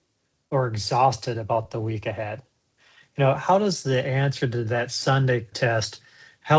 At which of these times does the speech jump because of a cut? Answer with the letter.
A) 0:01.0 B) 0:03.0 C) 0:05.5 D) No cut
C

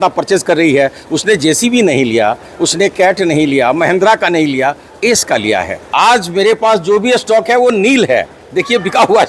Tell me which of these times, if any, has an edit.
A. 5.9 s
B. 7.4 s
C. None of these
A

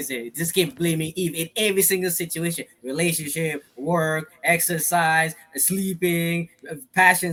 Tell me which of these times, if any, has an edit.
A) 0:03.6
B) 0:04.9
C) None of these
C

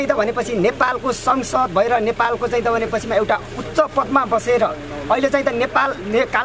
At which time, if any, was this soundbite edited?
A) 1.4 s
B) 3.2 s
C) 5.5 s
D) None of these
D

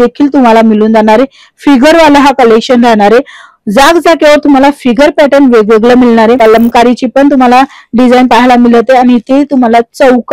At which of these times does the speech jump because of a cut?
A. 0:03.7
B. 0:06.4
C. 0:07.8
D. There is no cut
B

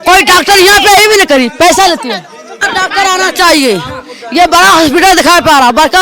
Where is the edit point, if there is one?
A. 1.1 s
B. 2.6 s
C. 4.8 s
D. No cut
B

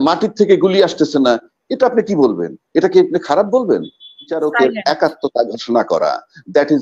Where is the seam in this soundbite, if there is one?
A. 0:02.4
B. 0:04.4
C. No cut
B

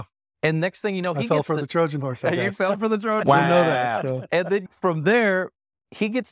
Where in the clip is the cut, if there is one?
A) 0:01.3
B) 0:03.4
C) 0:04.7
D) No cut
C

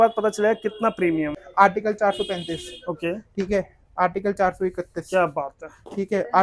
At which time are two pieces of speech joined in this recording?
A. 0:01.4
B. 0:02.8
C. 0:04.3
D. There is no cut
A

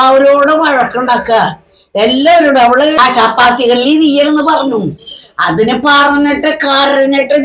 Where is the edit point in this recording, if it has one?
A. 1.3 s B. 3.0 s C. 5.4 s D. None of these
B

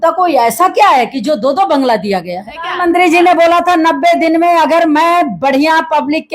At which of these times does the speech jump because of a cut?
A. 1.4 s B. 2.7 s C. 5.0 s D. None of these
B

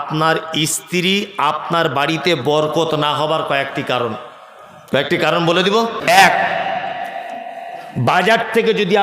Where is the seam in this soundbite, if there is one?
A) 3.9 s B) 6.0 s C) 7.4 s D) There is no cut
B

